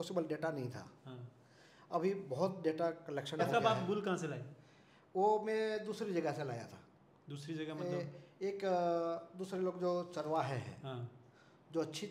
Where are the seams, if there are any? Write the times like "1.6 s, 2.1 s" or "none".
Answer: 3.4 s